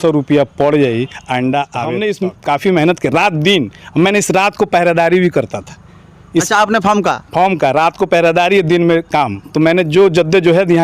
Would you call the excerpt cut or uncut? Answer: cut